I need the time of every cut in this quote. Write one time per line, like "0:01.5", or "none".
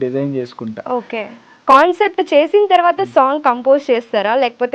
0:01.5